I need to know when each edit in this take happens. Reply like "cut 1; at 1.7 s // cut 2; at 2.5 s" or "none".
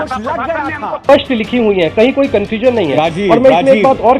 cut 1; at 1.1 s